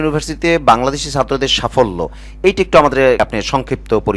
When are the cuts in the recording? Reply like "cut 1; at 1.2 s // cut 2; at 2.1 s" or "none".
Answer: cut 1; at 3.2 s